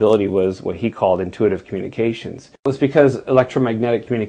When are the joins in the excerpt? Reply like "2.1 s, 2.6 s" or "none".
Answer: 2.6 s